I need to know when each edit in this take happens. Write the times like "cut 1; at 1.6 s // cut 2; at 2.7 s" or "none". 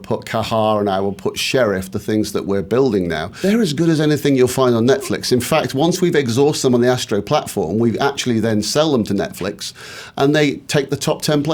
cut 1; at 3.3 s